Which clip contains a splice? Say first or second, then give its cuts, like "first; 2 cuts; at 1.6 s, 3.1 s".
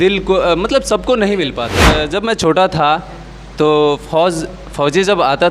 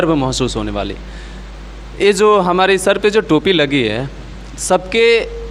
first; 1 cut; at 1.7 s